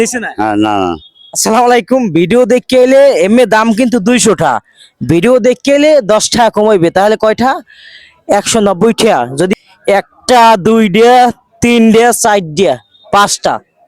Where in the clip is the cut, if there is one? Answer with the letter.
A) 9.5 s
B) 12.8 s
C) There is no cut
A